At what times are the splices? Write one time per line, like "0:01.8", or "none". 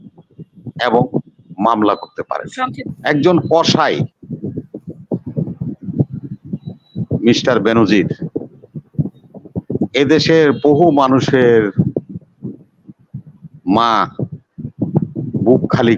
0:02.9